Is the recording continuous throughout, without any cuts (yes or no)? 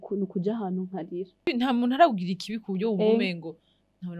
no